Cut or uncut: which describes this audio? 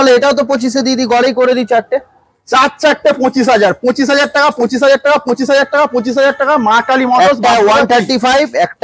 uncut